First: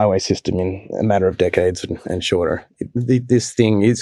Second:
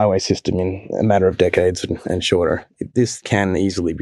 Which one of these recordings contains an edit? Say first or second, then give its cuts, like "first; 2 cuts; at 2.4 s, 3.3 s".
second; 1 cut; at 3.0 s